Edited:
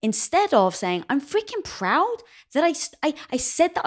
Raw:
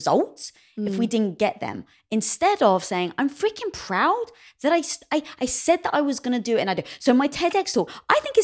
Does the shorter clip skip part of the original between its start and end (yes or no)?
no